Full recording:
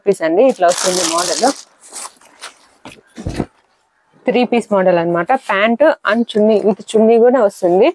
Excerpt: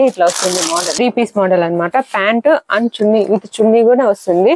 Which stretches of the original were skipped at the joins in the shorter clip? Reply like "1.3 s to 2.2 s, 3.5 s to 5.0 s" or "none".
1.4 s to 4.3 s